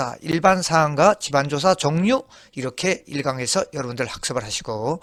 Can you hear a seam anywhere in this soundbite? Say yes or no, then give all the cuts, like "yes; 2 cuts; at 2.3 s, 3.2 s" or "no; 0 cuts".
no; 0 cuts